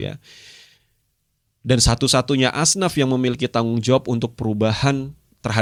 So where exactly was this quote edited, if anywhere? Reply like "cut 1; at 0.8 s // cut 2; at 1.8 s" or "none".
none